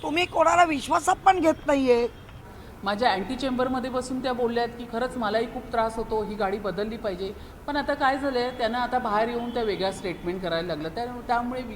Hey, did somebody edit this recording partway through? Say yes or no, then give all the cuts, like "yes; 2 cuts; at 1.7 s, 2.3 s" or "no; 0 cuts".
no; 0 cuts